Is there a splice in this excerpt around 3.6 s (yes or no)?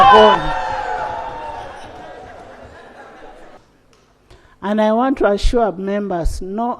yes